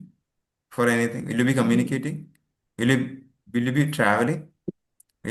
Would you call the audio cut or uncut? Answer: uncut